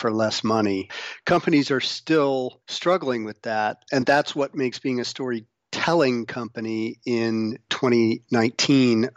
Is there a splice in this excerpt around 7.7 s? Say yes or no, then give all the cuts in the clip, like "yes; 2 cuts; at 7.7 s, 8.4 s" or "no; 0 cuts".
yes; 4 cuts; at 0.9 s, 2.6 s, 3.8 s, 7.7 s